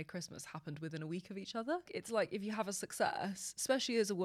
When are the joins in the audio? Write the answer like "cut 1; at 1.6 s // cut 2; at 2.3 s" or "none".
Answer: cut 1; at 1.9 s